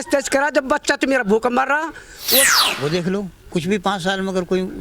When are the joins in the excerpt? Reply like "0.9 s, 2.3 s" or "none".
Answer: 2.4 s